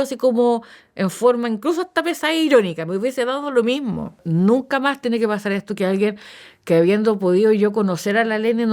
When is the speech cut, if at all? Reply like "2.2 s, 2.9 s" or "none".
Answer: 4.1 s